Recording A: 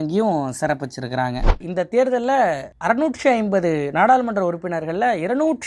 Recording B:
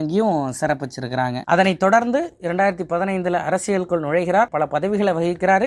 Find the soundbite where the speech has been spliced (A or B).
A